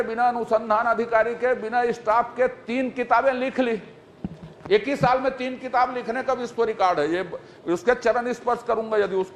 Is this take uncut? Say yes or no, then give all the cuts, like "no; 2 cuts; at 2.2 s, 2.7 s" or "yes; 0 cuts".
yes; 0 cuts